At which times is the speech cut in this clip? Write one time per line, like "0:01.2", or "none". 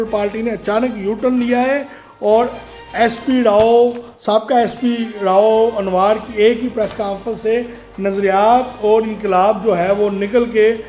none